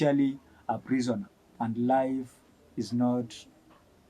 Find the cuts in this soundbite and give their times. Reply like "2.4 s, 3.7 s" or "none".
1.4 s